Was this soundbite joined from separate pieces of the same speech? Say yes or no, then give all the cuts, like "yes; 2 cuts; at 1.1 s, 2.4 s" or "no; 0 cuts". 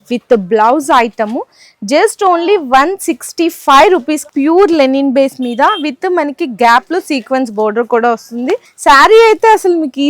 yes; 2 cuts; at 4.2 s, 8.7 s